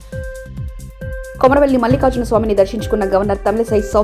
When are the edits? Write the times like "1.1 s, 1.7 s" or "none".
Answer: none

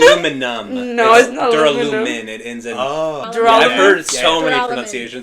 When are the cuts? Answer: 3.2 s

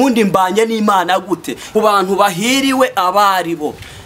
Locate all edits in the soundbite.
1.5 s

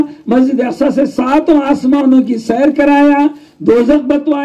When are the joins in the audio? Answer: none

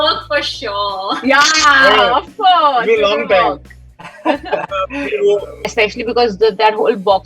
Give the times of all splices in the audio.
5.7 s

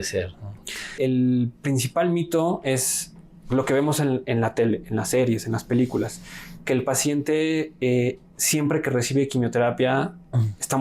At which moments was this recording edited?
0.9 s

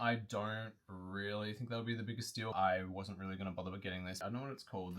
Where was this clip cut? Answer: 2.5 s, 4.2 s

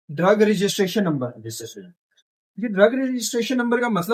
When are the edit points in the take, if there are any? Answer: none

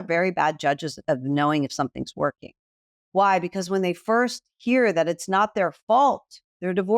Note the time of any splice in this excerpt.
0.9 s

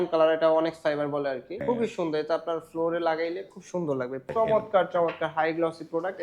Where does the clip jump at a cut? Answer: 1.6 s, 4.3 s

